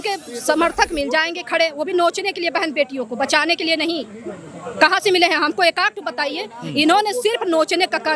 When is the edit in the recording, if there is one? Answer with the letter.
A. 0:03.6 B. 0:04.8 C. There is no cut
C